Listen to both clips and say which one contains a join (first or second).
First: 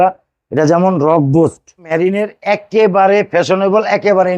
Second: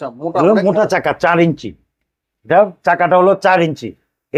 first